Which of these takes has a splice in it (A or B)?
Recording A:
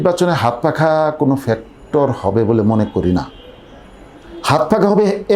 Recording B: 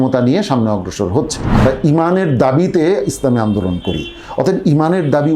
B